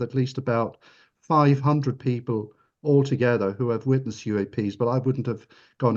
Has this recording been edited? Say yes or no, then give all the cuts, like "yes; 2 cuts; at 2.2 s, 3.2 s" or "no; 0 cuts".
no; 0 cuts